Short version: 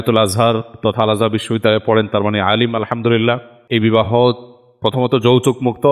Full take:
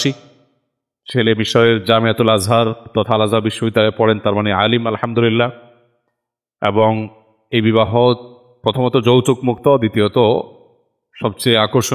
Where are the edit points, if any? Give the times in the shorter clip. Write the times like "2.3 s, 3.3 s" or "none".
3.5 s

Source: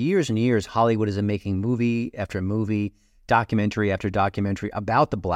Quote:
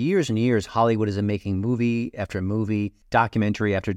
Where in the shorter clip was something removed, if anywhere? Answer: 3.0 s

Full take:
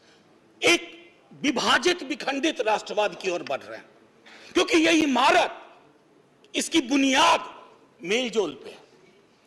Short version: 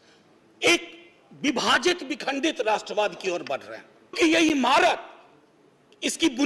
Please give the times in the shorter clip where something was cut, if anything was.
4.2 s

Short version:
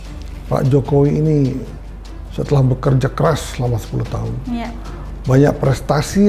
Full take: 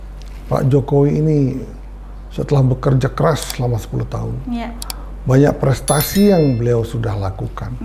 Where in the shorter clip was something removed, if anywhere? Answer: none

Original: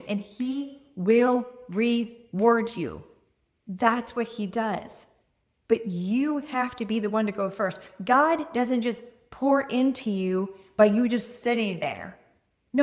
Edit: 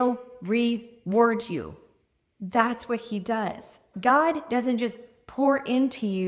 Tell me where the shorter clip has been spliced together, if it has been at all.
3.8 s

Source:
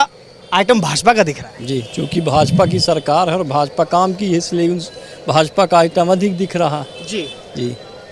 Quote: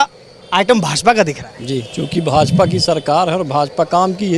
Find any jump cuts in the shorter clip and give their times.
none

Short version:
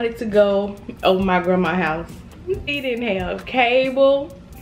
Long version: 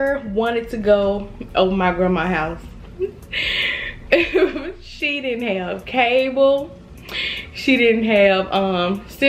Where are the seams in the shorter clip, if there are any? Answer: 2.7 s

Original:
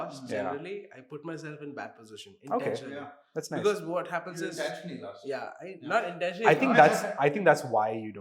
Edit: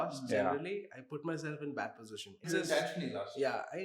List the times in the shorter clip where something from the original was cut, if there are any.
2.4 s

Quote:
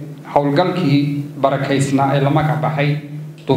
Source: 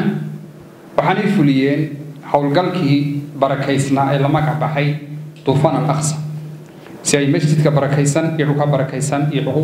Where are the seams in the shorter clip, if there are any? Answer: none

